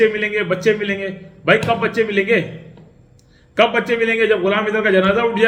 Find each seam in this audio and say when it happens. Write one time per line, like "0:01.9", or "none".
none